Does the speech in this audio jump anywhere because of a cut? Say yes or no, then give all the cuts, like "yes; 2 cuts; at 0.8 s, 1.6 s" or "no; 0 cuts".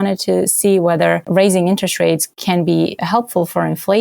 yes; 2 cuts; at 1.2 s, 3.0 s